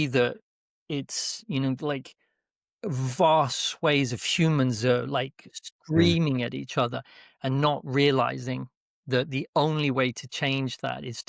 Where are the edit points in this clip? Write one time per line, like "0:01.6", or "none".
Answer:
none